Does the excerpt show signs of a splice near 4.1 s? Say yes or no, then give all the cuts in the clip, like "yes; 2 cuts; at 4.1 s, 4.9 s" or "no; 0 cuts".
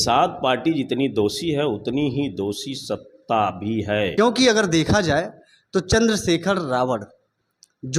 yes; 1 cut; at 4.1 s